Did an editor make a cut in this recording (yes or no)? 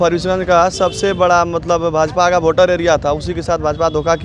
no